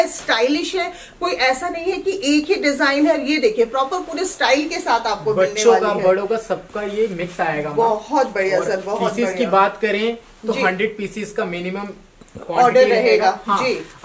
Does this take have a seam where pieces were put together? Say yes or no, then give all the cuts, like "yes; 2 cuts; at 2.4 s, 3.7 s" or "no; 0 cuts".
no; 0 cuts